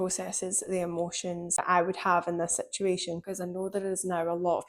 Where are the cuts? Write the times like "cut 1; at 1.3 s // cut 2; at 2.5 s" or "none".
cut 1; at 1.6 s // cut 2; at 3.2 s